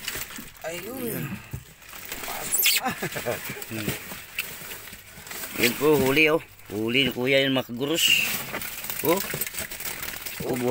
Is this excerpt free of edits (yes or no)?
yes